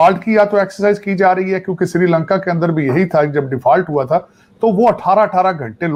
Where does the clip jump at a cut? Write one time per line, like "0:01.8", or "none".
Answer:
none

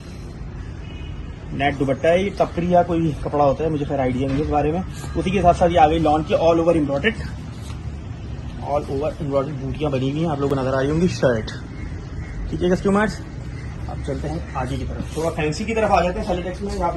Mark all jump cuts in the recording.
none

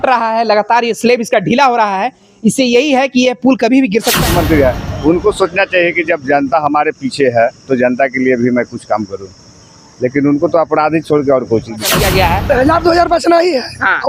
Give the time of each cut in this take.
0:04.2
0:11.9

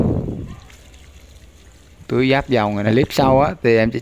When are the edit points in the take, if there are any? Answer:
0:02.9

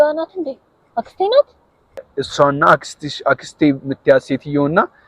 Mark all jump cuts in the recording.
0:02.1

